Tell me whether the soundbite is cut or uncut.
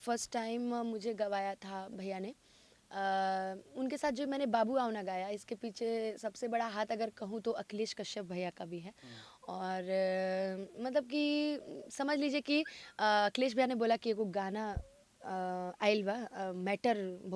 uncut